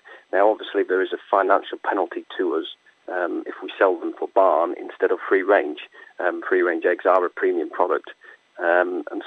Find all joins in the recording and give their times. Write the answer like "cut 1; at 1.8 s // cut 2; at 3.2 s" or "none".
none